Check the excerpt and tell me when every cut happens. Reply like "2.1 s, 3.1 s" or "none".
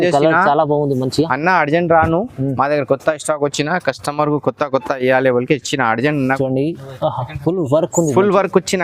6.4 s